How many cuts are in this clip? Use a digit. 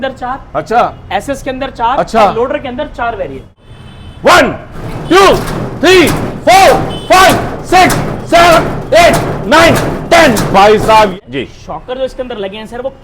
2